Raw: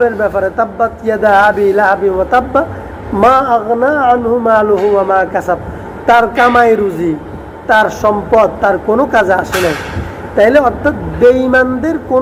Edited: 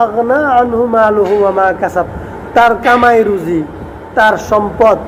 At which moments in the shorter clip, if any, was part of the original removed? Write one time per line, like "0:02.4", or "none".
none